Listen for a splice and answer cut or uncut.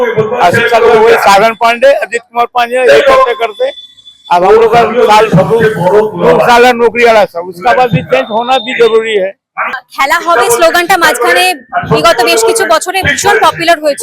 uncut